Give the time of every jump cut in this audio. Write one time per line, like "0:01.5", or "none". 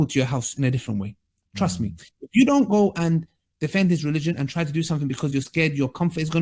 none